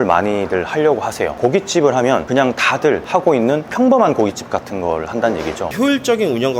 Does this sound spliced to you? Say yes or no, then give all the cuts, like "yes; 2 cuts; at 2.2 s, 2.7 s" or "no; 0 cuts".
yes; 2 cuts; at 1.4 s, 5.7 s